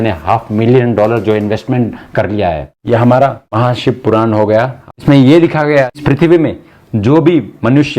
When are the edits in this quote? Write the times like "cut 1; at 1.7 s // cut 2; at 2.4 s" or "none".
cut 1; at 2.7 s // cut 2; at 3.4 s // cut 3; at 4.8 s // cut 4; at 6.0 s